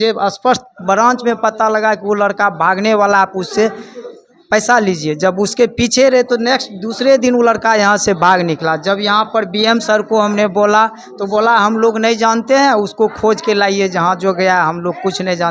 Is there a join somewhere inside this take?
no; 0 cuts

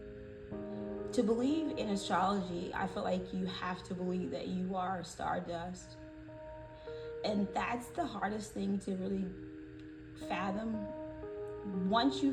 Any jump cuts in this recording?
yes; 1 cut; at 0.9 s

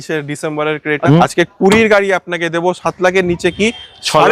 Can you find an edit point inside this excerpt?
yes; 1 cut; at 1.0 s

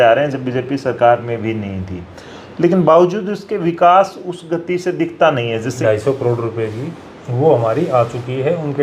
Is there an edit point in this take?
yes; 1 cut; at 5.7 s

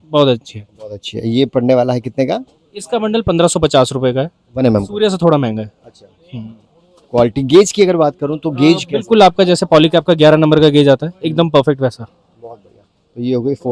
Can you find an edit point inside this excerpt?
no; 0 cuts

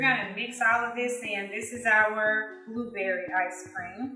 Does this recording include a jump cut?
no; 0 cuts

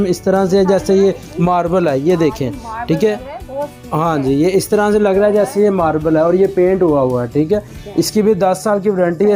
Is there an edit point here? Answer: no; 0 cuts

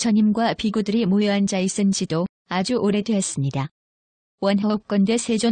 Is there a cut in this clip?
yes; 1 cut; at 1.2 s

